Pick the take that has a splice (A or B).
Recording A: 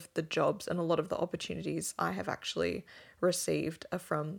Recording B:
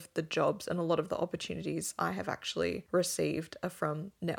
B